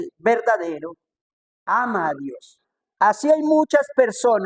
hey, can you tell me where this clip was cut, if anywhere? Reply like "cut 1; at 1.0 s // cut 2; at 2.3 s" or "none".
cut 1; at 3.0 s